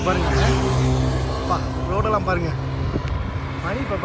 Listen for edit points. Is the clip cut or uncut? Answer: uncut